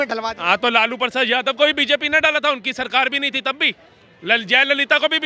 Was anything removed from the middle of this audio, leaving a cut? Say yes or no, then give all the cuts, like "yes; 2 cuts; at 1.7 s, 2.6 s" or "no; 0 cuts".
no; 0 cuts